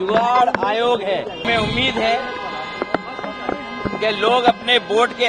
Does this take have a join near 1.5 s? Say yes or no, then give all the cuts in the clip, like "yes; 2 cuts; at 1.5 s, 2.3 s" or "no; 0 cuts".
yes; 1 cut; at 1.5 s